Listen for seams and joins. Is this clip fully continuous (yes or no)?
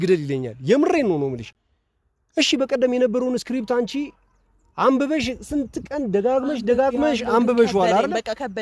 yes